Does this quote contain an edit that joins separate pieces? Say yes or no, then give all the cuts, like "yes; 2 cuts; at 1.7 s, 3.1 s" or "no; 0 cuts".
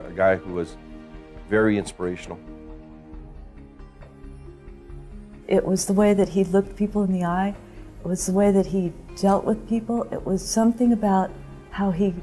no; 0 cuts